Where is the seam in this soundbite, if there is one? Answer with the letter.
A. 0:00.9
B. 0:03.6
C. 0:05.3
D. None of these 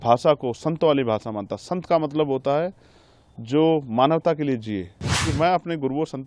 C